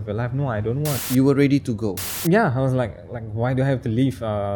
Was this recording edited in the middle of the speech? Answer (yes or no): yes